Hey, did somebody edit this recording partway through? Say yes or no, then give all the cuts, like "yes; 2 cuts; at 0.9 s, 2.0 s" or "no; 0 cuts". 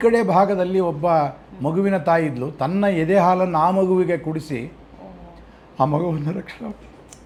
no; 0 cuts